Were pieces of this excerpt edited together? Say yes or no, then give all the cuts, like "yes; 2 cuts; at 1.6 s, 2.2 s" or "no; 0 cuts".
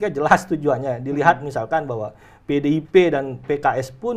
no; 0 cuts